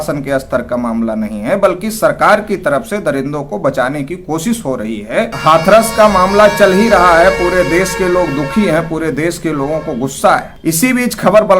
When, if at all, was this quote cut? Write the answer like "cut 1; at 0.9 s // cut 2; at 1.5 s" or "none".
cut 1; at 5.3 s // cut 2; at 10.5 s